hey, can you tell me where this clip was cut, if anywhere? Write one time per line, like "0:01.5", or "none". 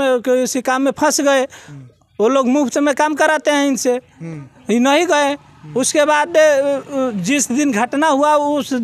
none

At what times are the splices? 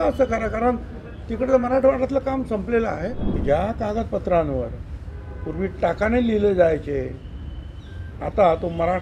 0:03.3

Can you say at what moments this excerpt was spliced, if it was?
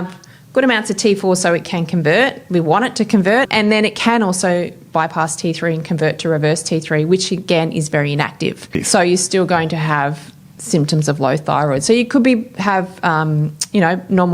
0:03.5
0:08.7

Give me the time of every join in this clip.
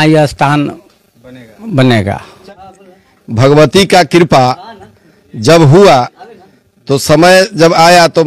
0:02.7

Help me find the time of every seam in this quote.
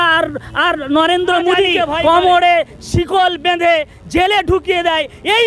0:02.0

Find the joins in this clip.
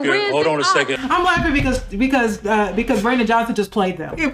0:01.0

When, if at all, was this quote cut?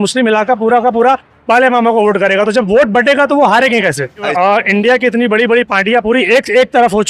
0:04.3

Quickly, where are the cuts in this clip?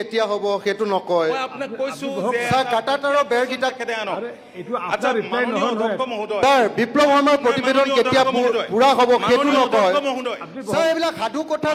none

